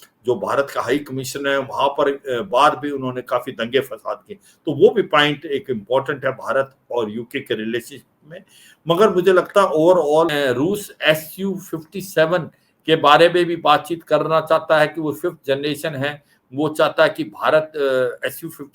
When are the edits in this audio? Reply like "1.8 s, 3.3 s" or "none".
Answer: 10.3 s